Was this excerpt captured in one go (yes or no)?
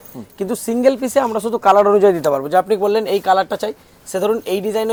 yes